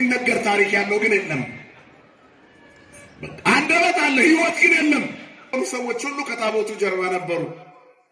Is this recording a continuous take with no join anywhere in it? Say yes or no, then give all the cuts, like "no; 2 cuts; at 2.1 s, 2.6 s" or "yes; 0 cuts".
no; 1 cut; at 5.5 s